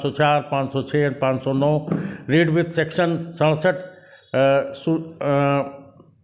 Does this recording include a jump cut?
no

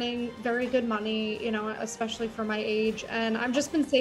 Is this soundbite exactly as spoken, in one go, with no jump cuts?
yes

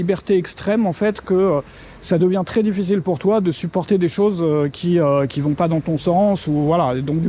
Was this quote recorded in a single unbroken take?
yes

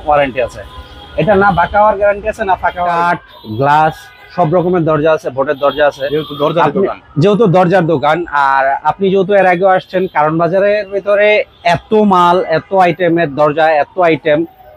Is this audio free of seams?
no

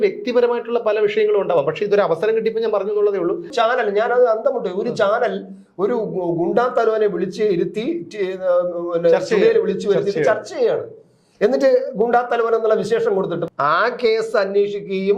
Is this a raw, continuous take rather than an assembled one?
no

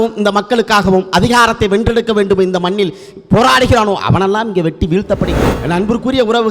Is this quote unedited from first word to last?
no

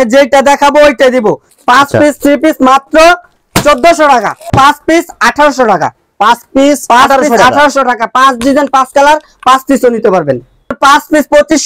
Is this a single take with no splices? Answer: no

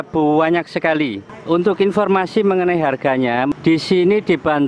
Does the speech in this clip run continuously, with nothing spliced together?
no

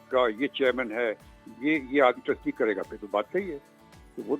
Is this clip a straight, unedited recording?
yes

